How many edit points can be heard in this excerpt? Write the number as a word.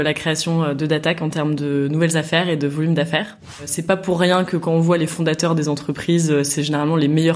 one